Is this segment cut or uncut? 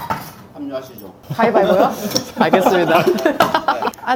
uncut